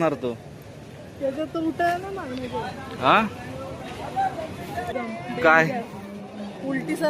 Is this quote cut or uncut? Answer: cut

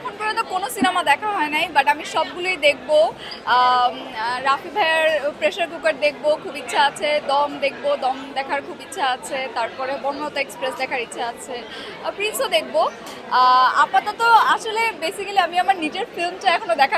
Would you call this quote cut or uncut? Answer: uncut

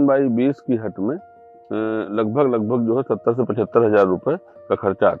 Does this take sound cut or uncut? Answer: uncut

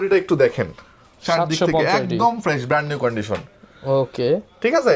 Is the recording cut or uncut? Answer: uncut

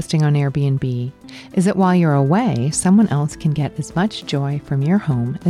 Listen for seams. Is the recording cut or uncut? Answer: uncut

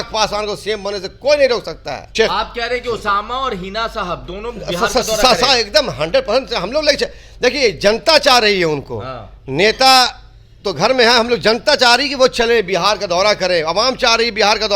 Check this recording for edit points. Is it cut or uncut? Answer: cut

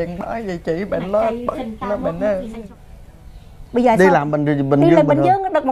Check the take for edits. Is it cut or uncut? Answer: cut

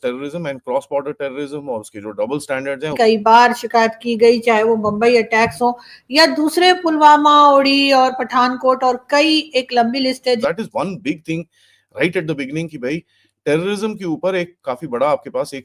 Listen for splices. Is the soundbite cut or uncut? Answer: cut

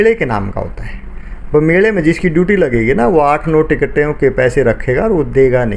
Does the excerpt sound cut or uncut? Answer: uncut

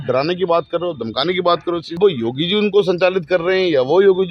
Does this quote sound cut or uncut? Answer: cut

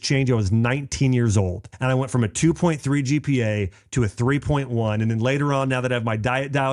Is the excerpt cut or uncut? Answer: cut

